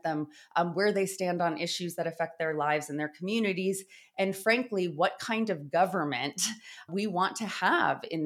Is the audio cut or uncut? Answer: cut